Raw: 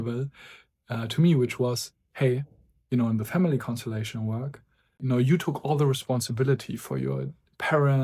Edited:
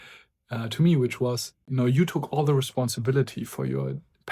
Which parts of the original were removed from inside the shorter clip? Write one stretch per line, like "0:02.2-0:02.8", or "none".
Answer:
0:01.9-0:04.9